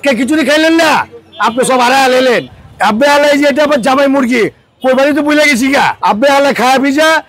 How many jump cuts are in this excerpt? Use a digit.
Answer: 2